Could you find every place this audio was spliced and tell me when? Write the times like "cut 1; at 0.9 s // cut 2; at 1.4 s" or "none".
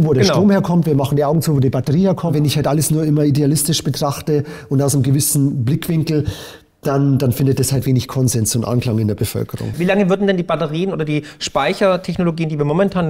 cut 1; at 2.3 s // cut 2; at 9.7 s